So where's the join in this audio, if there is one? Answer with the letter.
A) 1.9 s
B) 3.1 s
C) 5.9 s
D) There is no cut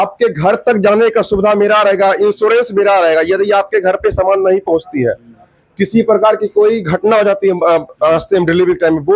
D